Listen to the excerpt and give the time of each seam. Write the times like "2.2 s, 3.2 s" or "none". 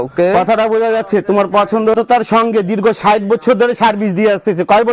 1.9 s